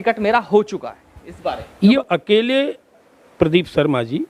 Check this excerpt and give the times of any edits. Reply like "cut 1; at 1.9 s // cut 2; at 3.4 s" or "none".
cut 1; at 2.0 s